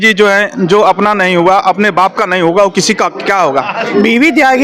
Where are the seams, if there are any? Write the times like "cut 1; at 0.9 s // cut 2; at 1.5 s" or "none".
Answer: cut 1; at 3.8 s